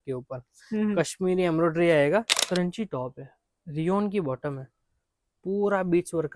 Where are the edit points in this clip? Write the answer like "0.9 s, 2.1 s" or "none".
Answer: 2.4 s